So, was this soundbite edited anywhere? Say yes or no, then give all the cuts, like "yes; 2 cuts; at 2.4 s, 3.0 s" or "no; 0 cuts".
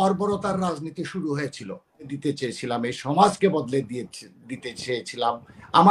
yes; 1 cut; at 2.1 s